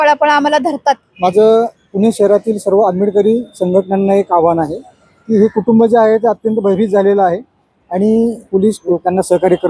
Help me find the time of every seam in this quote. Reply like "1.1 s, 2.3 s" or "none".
1.1 s, 8.7 s